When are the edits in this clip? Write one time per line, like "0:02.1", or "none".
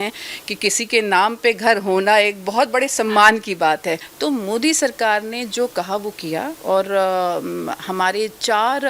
0:04.1

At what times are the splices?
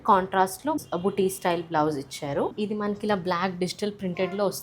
0:00.8
0:02.5

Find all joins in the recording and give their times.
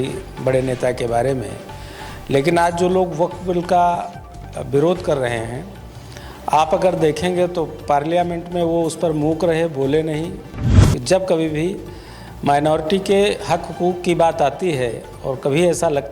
0:10.6

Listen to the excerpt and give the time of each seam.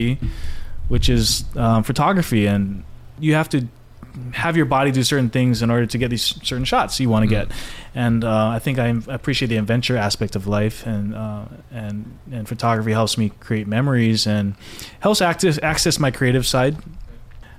0:03.1

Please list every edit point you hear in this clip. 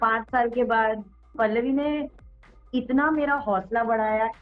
0:01.4

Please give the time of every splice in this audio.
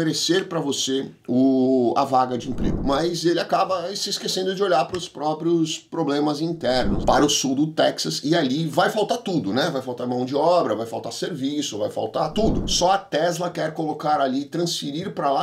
0:02.8
0:07.0
0:12.6

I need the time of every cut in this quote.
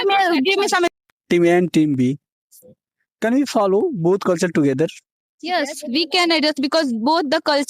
0:00.9

